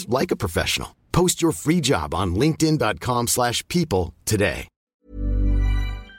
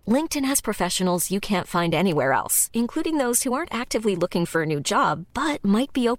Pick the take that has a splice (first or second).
first